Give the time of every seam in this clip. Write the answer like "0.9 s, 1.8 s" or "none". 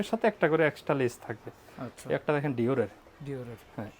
none

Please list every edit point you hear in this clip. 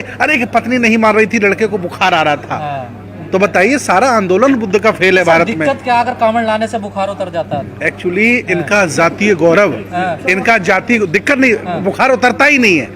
none

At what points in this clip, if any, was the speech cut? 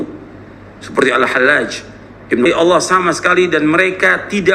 2.5 s

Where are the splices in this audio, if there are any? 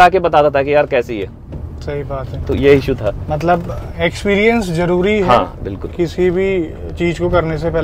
none

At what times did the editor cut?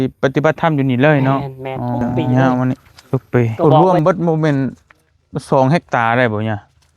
2.3 s

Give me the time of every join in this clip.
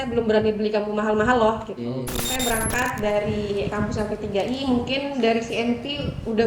2.3 s

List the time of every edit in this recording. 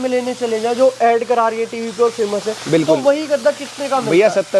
none

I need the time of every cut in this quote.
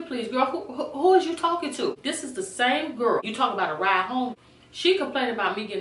2.1 s, 3.3 s, 4.4 s

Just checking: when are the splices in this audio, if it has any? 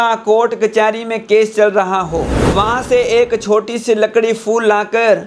2.4 s

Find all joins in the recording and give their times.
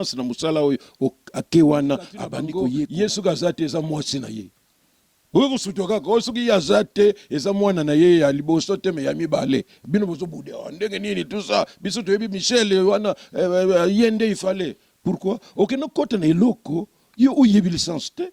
2.6 s

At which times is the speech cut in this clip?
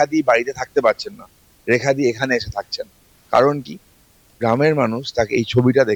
none

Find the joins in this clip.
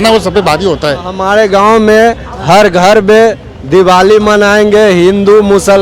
1.2 s

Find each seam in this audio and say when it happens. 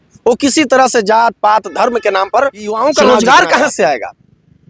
2.8 s

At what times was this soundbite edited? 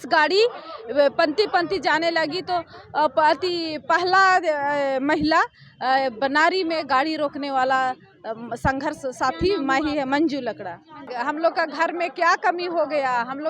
11.1 s

